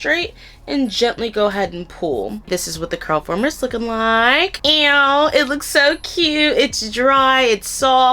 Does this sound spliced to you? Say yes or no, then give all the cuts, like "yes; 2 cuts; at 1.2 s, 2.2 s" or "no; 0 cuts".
yes; 1 cut; at 2.5 s